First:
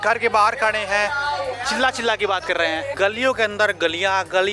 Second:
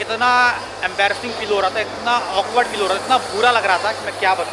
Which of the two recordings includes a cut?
first; 2 cuts; at 1.5 s, 2.9 s

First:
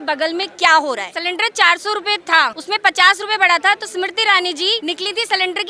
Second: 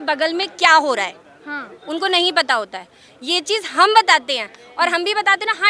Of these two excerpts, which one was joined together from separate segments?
first; 3 cuts; at 1.1 s, 2.6 s, 4.8 s

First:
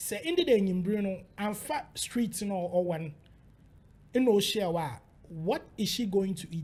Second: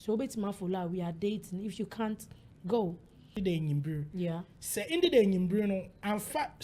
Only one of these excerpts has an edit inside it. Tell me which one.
second; 1 cut; at 3.4 s

